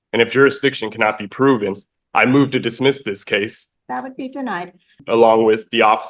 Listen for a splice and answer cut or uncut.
cut